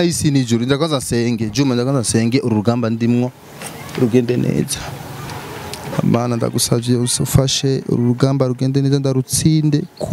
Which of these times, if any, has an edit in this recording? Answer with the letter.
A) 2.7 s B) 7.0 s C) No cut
C